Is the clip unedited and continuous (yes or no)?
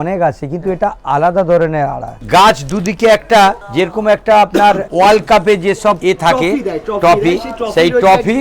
no